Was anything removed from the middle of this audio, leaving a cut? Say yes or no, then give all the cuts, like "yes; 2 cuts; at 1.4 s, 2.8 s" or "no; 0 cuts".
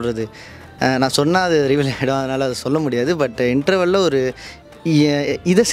no; 0 cuts